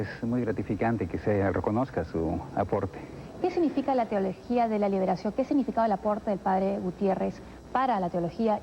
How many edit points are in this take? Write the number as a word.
one